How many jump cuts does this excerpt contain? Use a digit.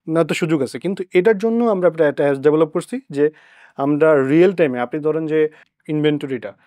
1